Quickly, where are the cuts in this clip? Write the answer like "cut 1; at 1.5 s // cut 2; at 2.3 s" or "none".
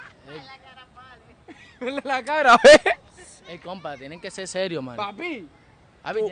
none